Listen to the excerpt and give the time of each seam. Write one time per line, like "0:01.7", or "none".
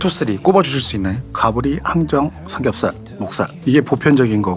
0:03.6

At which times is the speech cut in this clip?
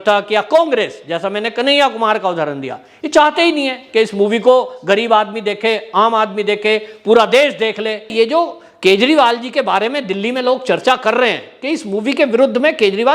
0:08.1

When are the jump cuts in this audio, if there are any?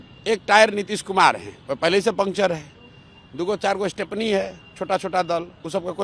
none

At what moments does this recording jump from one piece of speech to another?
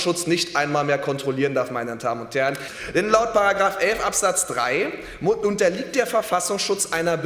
0:02.7

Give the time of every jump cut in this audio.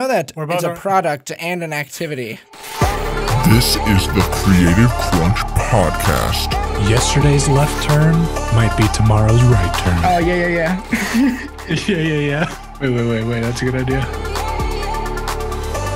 0:02.6

